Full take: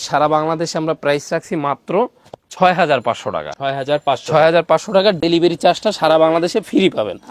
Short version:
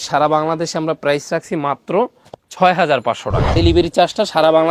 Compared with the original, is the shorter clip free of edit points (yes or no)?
no